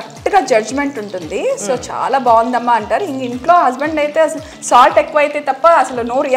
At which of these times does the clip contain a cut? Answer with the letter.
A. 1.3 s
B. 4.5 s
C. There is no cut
C